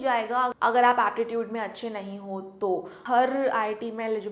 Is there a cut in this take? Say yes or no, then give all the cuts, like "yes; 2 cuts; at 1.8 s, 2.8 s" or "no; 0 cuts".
yes; 1 cut; at 3.0 s